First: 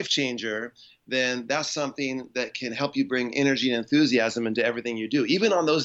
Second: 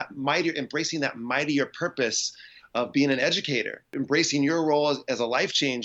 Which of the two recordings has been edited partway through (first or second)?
second